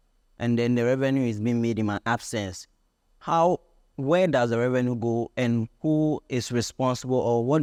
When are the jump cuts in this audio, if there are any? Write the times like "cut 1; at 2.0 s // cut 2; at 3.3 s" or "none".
none